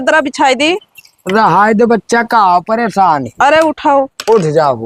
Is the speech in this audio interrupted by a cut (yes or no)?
no